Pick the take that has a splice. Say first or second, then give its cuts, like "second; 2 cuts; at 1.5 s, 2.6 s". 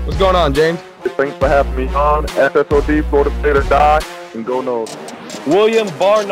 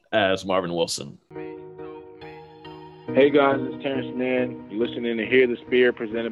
second; 1 cut; at 1.3 s